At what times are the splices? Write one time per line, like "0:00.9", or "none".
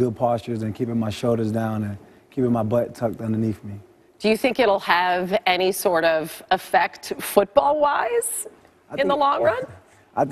0:02.5